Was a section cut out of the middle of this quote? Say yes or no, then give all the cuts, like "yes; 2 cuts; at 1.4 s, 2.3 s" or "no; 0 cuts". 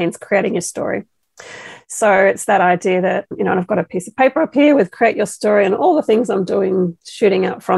no; 0 cuts